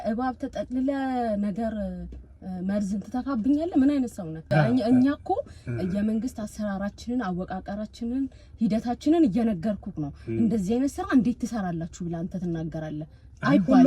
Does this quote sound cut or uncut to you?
cut